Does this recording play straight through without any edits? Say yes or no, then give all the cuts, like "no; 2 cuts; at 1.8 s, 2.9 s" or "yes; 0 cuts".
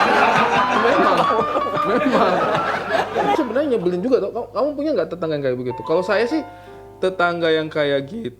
no; 1 cut; at 3.4 s